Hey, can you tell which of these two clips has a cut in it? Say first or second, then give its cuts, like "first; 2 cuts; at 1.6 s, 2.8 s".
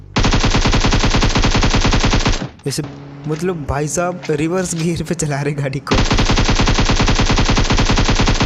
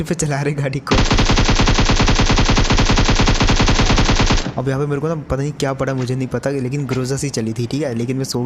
first; 1 cut; at 2.8 s